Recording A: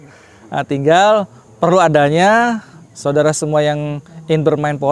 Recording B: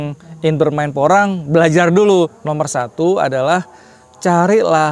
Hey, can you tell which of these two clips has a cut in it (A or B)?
B